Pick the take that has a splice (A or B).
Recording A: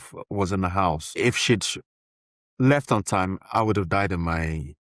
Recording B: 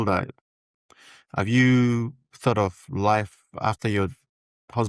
A